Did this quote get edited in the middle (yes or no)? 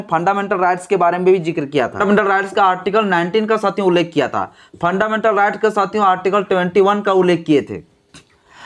yes